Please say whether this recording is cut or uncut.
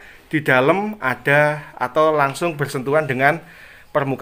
uncut